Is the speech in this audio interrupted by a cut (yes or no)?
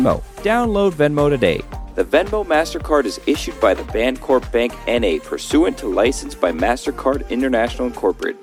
no